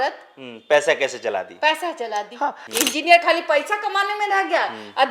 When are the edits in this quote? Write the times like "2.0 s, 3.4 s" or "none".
2.6 s